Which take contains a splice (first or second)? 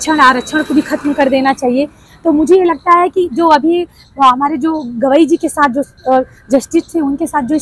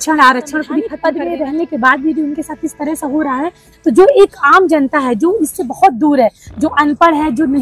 second